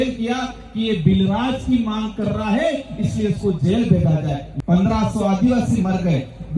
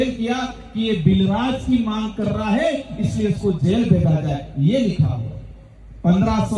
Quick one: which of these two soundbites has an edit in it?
first; 1 cut; at 4.4 s

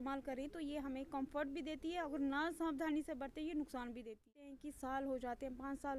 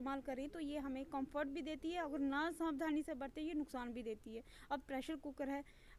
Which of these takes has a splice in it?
first; 1 cut; at 4.6 s

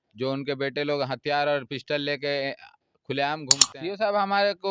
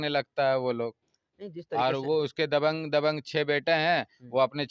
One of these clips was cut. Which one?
first; 1 cut; at 3.6 s

